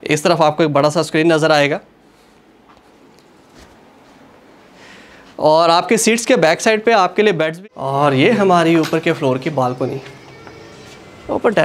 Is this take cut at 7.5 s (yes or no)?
yes